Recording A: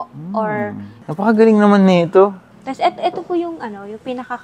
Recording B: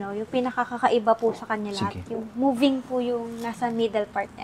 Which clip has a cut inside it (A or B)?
A